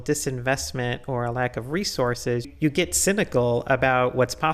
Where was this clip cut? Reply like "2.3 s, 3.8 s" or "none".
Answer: 2.5 s